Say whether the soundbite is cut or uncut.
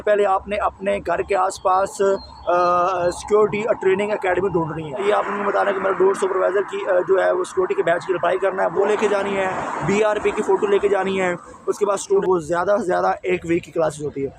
cut